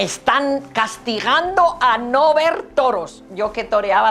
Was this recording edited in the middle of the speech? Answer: no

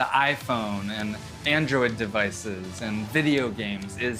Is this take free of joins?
yes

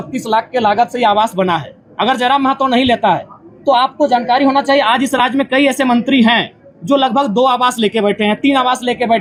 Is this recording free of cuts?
yes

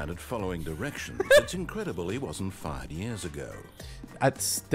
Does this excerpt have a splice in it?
no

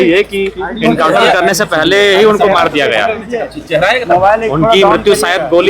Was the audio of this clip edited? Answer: no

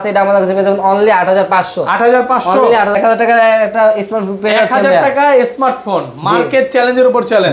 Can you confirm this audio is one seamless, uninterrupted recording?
no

